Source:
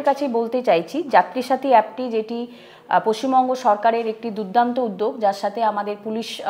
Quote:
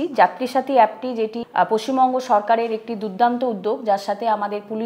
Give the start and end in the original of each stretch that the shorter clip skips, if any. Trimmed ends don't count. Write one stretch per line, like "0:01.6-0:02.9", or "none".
0:02.4-0:02.8